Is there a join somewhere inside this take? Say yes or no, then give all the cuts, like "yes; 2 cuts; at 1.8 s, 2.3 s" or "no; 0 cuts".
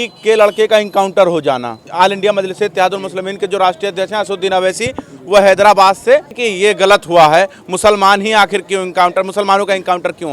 yes; 2 cuts; at 1.9 s, 6.4 s